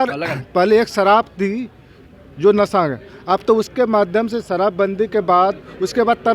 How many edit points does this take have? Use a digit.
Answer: 0